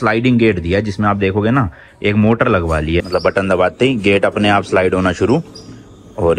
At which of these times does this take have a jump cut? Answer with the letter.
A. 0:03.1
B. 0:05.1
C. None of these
A